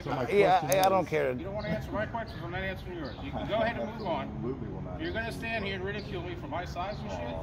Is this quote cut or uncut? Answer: cut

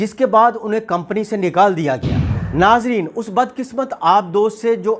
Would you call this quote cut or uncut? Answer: cut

